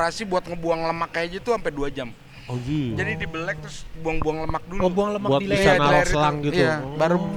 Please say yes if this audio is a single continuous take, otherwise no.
yes